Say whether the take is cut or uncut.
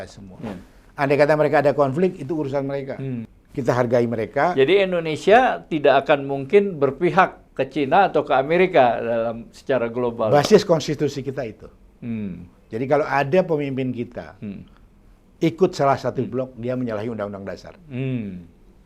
cut